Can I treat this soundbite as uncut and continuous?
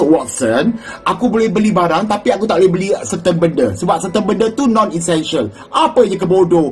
yes; 0 cuts

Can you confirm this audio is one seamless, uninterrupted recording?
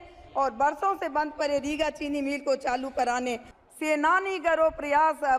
no; 1 cut; at 3.5 s

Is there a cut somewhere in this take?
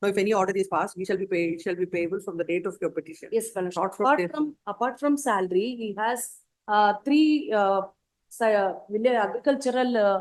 no; 0 cuts

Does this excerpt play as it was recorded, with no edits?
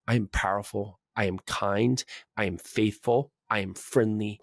yes; 0 cuts

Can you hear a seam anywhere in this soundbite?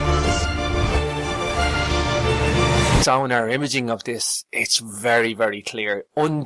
no; 0 cuts

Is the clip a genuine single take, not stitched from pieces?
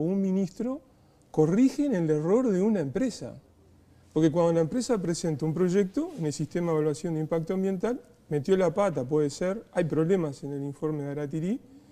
yes; 0 cuts

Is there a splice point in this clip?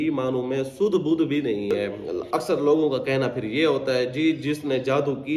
yes; 1 cut; at 2.0 s

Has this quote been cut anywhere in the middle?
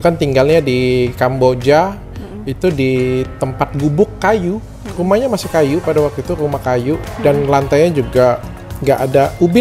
no; 0 cuts

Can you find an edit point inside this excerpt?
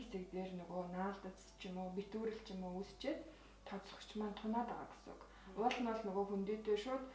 no; 0 cuts

